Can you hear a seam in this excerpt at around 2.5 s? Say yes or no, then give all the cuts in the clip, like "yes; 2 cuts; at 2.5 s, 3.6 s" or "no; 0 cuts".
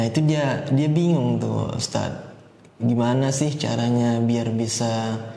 no; 0 cuts